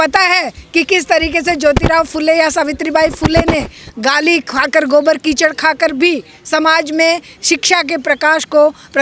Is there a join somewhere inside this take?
no; 0 cuts

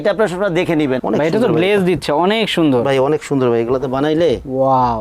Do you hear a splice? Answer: yes; 1 cut; at 1.0 s

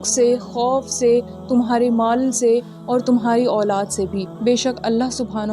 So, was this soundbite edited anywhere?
yes; 1 cut; at 4.3 s

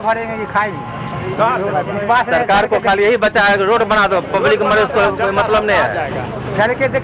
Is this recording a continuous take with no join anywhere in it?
yes; 0 cuts

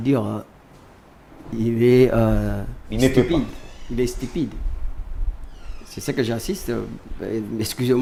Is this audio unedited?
yes; 0 cuts

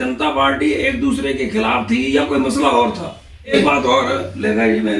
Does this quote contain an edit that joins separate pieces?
yes; 1 cut; at 3.5 s

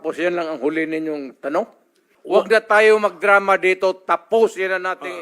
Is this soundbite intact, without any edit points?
no; 1 cut; at 2.1 s

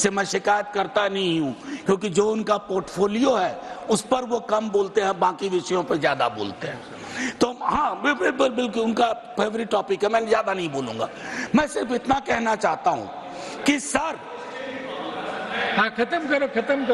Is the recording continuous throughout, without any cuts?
yes; 0 cuts

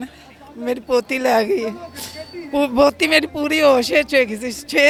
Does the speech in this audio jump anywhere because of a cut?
no; 0 cuts

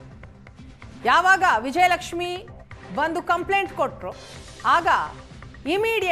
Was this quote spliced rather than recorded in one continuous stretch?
yes; 1 cut; at 1.0 s

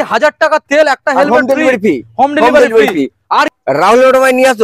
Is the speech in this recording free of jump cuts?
no; 1 cut; at 3.5 s

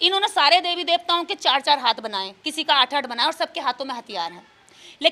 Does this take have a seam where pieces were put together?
no; 0 cuts

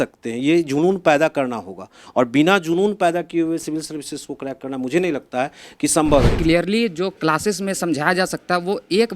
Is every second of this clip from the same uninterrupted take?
no; 1 cut; at 6.3 s

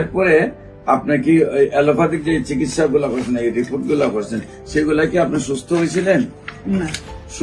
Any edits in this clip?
no; 0 cuts

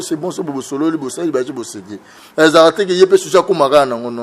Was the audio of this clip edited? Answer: no; 0 cuts

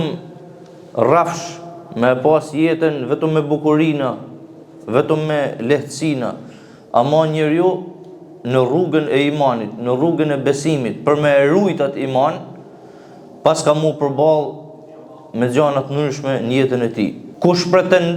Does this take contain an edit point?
yes; 1 cut; at 17.2 s

